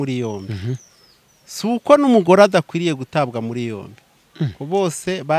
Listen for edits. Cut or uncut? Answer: uncut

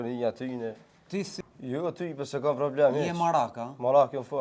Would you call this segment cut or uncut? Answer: cut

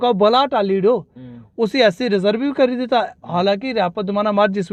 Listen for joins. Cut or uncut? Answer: uncut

